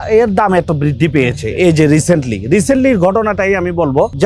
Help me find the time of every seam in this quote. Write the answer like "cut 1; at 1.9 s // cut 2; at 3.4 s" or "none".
none